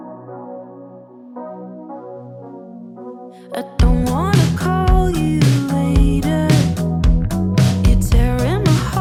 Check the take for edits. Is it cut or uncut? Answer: uncut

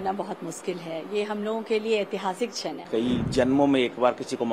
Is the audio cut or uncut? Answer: cut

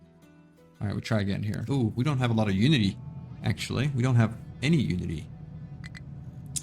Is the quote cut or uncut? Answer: cut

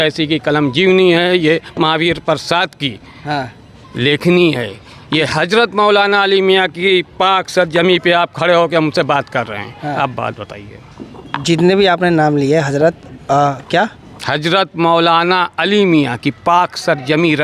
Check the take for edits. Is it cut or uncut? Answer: uncut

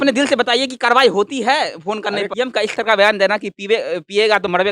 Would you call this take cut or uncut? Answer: cut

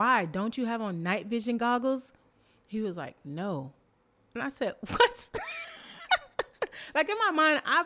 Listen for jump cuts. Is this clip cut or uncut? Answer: uncut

